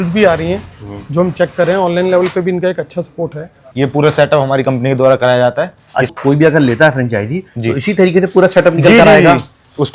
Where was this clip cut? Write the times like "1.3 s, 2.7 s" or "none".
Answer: 3.6 s, 6.1 s